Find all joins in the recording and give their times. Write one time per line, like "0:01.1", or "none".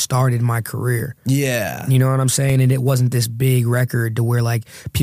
none

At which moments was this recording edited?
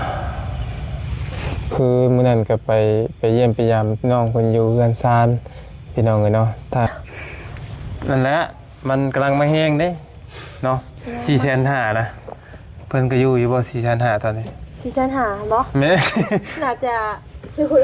0:06.9

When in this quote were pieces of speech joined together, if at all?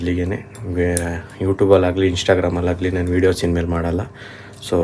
none

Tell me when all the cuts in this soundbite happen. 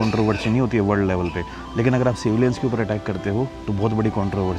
0:03.6

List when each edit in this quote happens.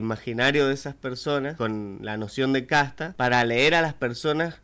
0:01.5
0:03.0

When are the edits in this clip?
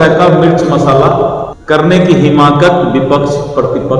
0:01.5

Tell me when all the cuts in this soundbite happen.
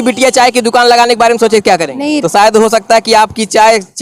0:02.2

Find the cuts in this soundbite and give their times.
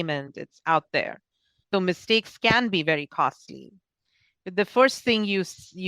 0:01.6

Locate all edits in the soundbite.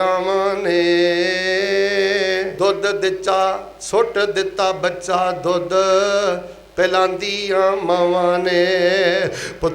0:02.5

